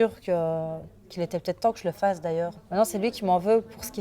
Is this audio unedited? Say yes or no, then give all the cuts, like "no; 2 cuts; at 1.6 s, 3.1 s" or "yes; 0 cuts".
no; 1 cut; at 2.6 s